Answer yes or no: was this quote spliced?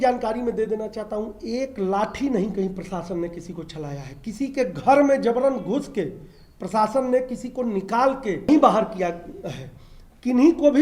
yes